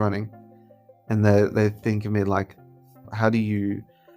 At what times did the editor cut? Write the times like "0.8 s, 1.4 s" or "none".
3.1 s

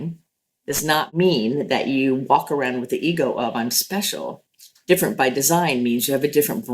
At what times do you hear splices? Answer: 1.1 s

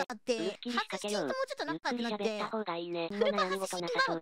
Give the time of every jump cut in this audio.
none

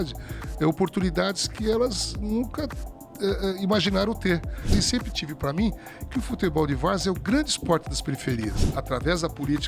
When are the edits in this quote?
4.7 s, 8.6 s

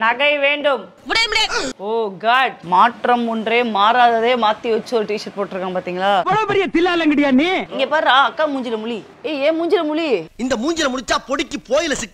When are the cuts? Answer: 2.6 s, 7.6 s, 10.3 s

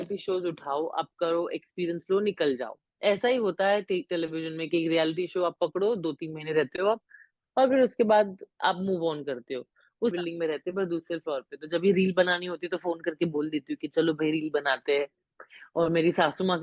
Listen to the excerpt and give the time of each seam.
10.1 s

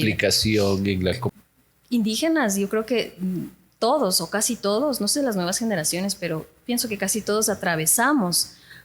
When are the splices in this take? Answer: 1.3 s

